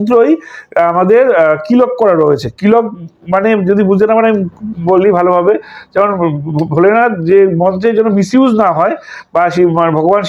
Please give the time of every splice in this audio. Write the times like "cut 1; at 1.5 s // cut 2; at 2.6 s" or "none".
none